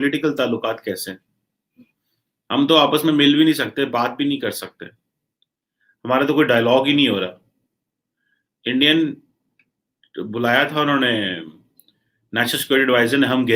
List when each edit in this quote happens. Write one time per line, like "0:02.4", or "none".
none